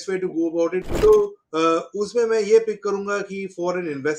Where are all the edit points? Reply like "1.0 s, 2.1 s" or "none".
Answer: 0.9 s